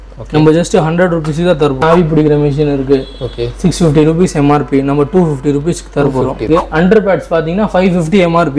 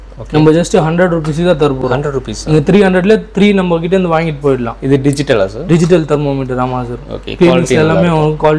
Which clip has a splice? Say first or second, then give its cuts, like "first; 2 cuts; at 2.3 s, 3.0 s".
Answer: first; 2 cuts; at 1.8 s, 6.5 s